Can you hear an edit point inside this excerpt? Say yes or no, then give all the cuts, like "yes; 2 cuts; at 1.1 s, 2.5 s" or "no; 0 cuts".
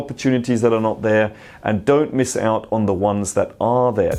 no; 0 cuts